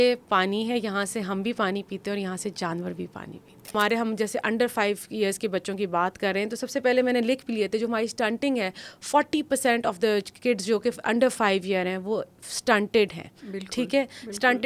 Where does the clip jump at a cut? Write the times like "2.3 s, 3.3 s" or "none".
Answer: 3.7 s